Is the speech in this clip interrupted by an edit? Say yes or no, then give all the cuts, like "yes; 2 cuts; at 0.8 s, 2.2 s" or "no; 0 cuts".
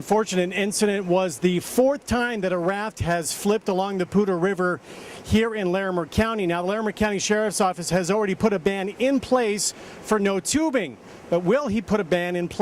no; 0 cuts